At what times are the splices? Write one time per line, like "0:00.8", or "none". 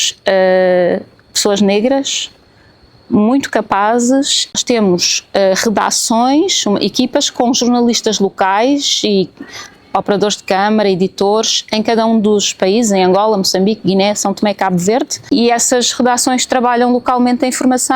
0:04.6
0:15.3